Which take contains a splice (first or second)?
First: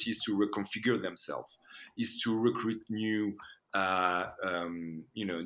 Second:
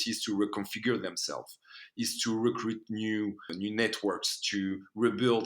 second